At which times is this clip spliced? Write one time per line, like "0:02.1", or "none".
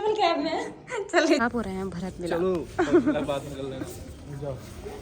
0:01.4